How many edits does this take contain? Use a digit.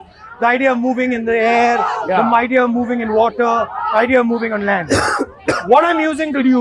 0